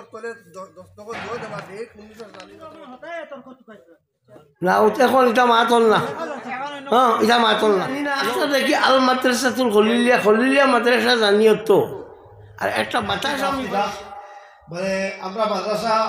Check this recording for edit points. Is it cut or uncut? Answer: cut